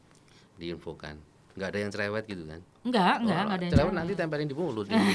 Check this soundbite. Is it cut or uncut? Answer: uncut